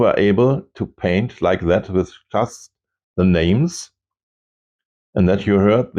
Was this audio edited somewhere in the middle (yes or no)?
no